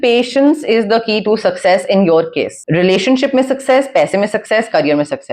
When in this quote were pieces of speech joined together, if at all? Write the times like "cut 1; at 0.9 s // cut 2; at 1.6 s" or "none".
cut 1; at 2.6 s